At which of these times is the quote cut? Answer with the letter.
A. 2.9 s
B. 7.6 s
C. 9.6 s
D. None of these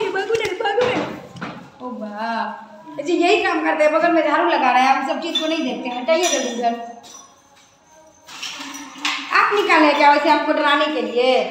D